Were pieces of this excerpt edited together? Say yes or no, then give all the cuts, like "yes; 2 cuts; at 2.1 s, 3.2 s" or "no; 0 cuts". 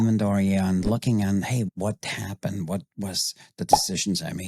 yes; 1 cut; at 1.7 s